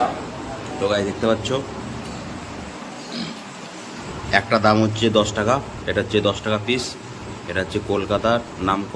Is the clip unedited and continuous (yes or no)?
yes